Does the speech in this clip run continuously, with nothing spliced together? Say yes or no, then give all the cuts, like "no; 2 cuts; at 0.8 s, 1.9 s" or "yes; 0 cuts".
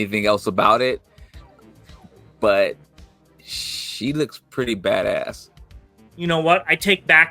no; 1 cut; at 6.1 s